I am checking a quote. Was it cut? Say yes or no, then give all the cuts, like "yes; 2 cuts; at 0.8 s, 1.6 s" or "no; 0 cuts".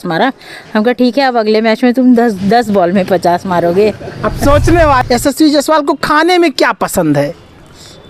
yes; 1 cut; at 5.0 s